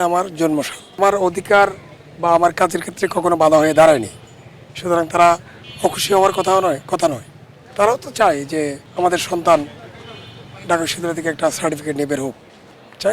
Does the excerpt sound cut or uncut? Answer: cut